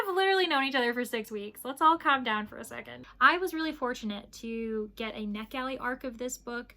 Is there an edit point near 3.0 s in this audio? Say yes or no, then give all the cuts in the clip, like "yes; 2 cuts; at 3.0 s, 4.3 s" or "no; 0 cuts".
yes; 1 cut; at 3.0 s